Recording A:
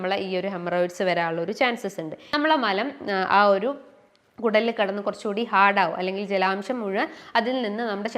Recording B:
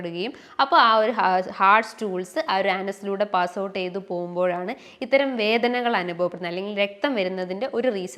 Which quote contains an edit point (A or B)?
A